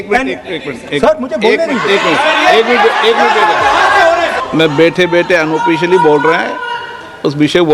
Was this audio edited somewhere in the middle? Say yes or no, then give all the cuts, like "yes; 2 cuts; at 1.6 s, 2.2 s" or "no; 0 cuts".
yes; 1 cut; at 4.4 s